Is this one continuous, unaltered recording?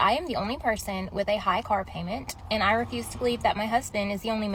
yes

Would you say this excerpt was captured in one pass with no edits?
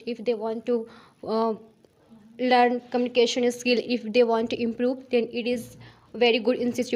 yes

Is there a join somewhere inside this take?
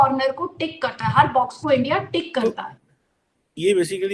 yes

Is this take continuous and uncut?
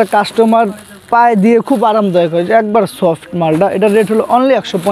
yes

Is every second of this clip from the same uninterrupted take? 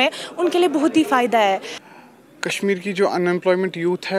no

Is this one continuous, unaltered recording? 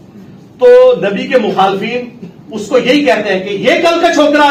yes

